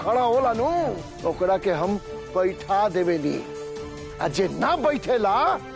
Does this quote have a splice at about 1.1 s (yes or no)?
yes